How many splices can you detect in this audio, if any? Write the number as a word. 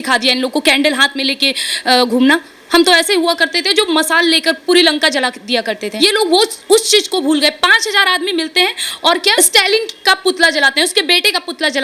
two